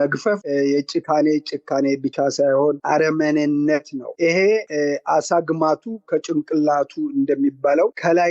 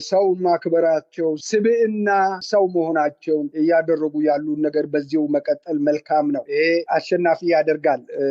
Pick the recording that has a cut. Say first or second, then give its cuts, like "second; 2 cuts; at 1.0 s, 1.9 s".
second; 2 cuts; at 2.4 s, 6.8 s